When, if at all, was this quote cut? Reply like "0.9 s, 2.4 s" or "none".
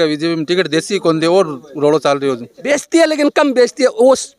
2.5 s